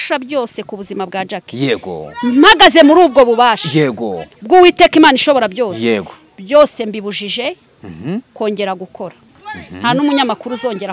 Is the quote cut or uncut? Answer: cut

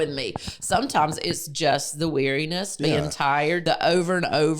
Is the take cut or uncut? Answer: cut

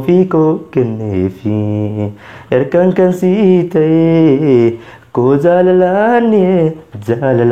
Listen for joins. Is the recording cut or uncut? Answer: uncut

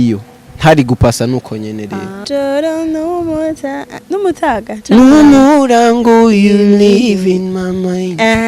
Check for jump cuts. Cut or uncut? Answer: cut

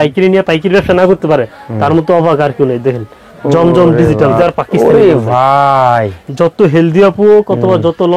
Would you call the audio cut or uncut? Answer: cut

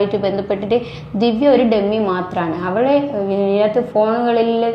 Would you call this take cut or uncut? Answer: uncut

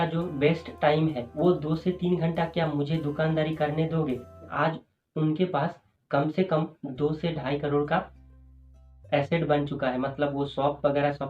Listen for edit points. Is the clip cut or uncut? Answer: cut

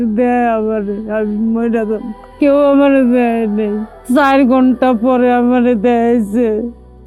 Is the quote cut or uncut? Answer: uncut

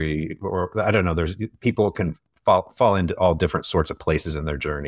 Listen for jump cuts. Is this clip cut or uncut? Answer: uncut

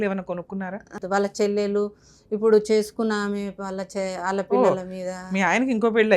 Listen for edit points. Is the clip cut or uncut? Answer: cut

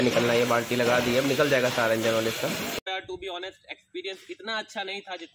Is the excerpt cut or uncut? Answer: cut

